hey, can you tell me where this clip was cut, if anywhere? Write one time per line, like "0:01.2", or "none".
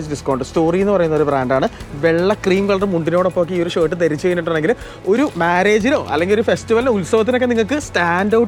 none